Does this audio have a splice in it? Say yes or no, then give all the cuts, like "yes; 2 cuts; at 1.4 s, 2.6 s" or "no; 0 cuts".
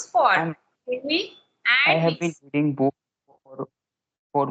no; 0 cuts